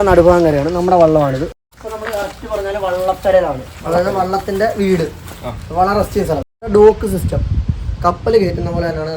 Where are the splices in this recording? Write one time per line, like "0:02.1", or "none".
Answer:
0:01.6
0:06.6